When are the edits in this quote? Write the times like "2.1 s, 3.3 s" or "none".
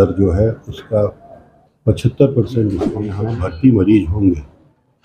3.0 s